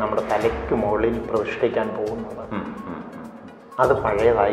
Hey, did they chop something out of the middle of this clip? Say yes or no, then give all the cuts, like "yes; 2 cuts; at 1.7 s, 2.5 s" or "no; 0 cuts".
no; 0 cuts